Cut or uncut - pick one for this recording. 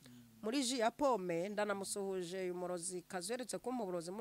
uncut